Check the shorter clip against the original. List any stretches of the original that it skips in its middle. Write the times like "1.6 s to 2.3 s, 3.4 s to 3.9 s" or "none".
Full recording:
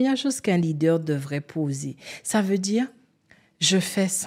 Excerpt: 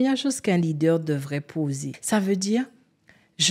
1.9 s to 2.1 s